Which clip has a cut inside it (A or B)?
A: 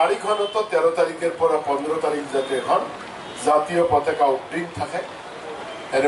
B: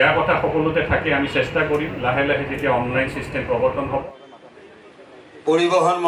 B